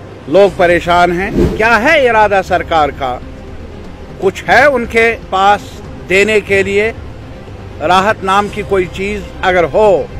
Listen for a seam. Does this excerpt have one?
yes; 1 cut; at 1.4 s

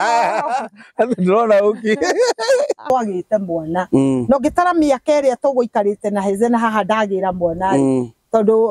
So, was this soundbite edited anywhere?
yes; 1 cut; at 2.9 s

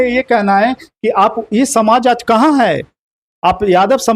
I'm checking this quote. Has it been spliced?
no; 0 cuts

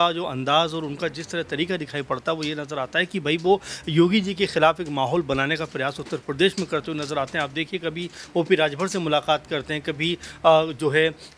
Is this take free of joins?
yes; 0 cuts

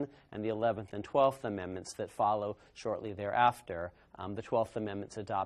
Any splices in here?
yes; 1 cut; at 2.4 s

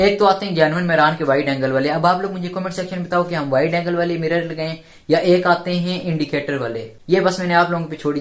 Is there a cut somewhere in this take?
yes; 1 cut; at 6.9 s

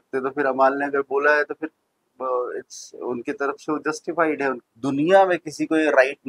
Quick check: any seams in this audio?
yes; 1 cut; at 4.6 s

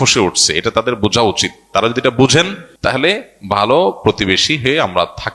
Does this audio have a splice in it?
yes; 1 cut; at 2.6 s

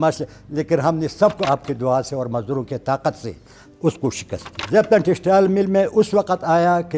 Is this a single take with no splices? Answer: no; 2 cuts; at 1.4 s, 4.5 s

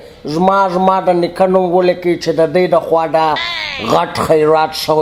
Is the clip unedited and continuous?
yes; 0 cuts

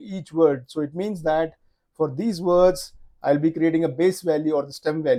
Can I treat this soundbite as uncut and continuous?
yes; 0 cuts

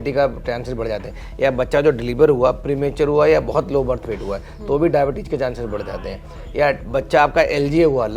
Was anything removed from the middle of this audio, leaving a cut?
no; 0 cuts

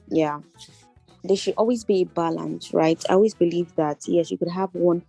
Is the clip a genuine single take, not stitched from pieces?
no; 1 cut; at 1.1 s

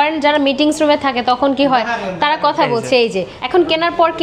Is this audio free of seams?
no; 1 cut; at 3.3 s

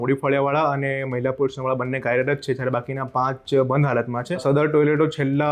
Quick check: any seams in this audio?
yes; 1 cut; at 4.4 s

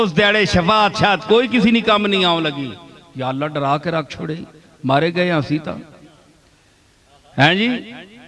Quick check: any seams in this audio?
no; 0 cuts

